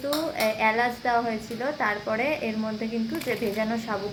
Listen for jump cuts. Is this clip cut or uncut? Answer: uncut